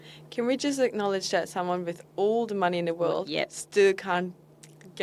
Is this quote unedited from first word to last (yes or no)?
yes